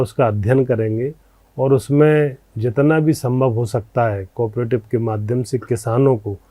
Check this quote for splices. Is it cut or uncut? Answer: uncut